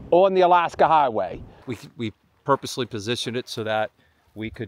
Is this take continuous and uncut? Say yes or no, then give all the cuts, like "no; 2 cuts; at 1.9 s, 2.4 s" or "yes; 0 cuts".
no; 1 cut; at 1.7 s